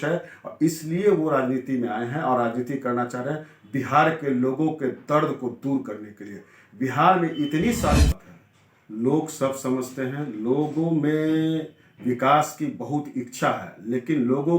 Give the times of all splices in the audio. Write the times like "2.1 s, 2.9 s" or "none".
8.1 s